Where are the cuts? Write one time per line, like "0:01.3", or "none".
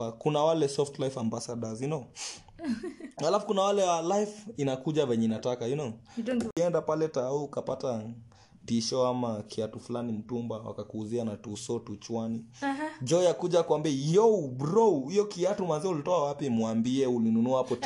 0:06.5